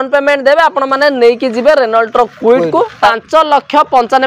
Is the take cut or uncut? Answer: cut